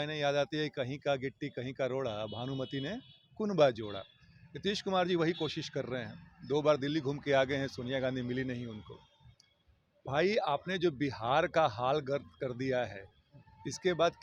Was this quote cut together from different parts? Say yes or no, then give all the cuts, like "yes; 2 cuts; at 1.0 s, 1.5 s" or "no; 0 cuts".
no; 0 cuts